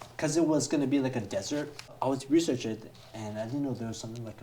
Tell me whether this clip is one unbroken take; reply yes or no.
no